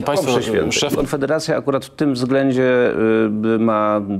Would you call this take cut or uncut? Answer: cut